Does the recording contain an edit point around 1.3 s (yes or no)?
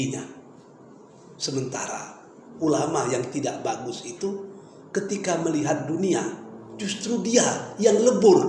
no